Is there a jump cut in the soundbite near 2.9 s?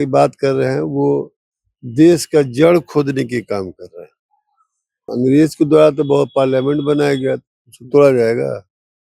no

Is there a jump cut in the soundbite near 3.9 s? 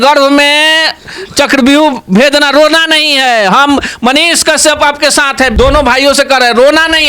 no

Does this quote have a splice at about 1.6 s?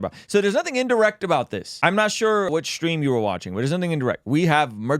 yes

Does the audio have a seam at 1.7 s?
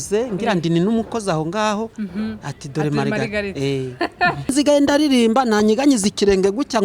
no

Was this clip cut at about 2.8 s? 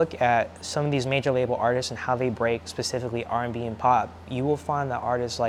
no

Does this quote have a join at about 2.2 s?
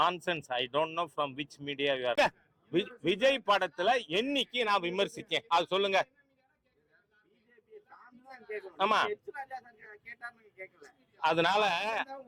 yes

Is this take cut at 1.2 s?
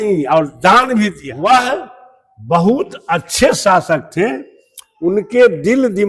yes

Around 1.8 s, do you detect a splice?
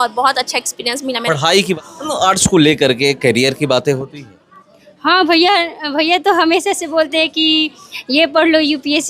yes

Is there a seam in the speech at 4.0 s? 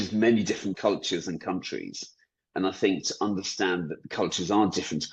yes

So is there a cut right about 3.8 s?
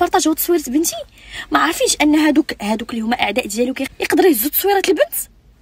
yes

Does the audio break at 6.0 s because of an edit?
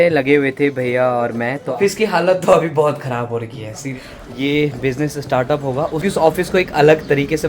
yes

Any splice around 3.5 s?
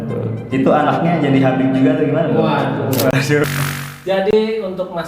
yes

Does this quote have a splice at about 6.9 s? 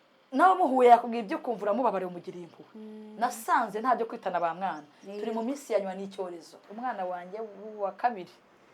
yes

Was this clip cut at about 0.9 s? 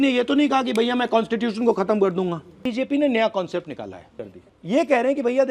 no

